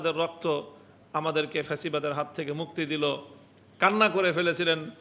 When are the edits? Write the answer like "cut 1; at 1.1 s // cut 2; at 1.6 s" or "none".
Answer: none